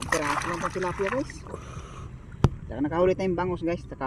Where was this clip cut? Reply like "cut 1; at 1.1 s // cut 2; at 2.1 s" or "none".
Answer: none

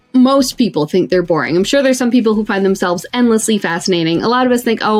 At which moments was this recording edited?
none

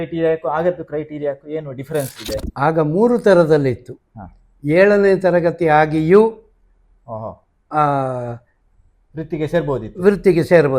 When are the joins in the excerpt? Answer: cut 1; at 2.5 s

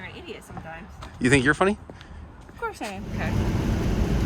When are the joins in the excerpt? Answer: cut 1; at 3.1 s

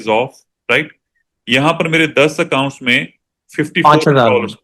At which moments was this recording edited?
none

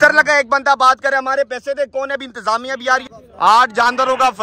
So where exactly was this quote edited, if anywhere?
cut 1; at 3.1 s

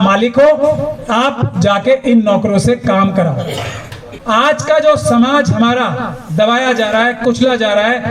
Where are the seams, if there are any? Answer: cut 1; at 4.1 s

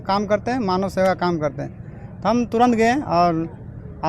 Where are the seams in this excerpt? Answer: none

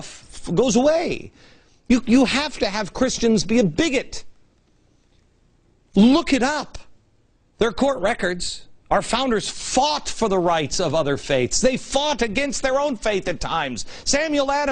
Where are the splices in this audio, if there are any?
cut 1; at 11.0 s

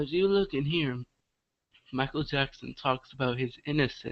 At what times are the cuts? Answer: cut 1; at 1.4 s

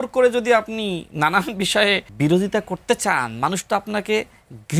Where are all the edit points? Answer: cut 1; at 2.1 s

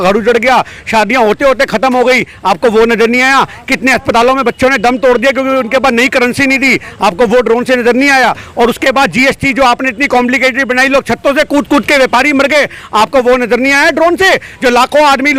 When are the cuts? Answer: none

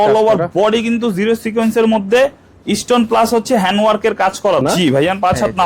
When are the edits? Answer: cut 1; at 4.6 s

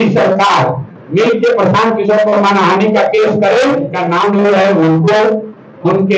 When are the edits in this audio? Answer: cut 1; at 4.0 s

